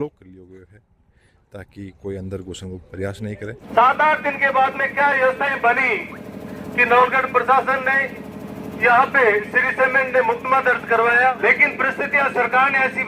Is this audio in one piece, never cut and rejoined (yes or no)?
no